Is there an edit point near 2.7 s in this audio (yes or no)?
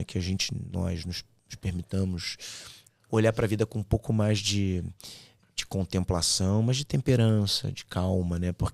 no